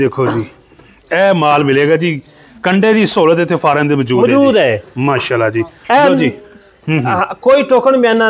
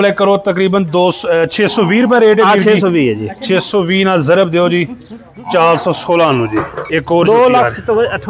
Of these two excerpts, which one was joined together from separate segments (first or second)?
second